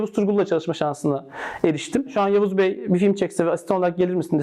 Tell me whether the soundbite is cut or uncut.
cut